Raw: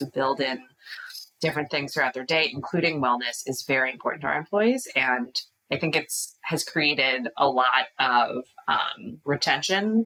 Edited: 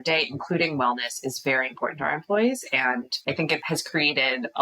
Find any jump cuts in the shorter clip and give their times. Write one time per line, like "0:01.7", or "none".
0:03.3